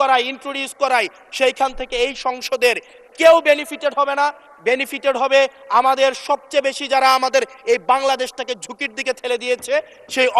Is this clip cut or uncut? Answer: uncut